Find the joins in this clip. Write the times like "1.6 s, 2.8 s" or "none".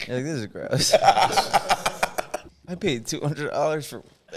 2.5 s